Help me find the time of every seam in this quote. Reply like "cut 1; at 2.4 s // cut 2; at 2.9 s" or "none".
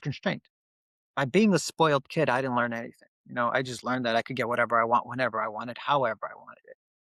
none